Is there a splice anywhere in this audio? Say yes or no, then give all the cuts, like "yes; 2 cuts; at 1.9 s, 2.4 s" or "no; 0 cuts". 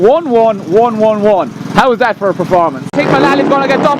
yes; 1 cut; at 2.9 s